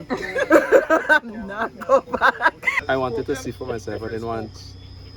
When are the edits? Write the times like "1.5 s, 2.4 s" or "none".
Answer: 2.7 s